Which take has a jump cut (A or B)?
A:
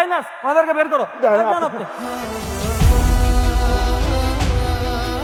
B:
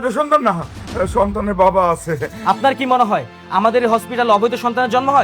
B